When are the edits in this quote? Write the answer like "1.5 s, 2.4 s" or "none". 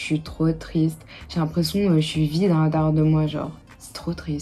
none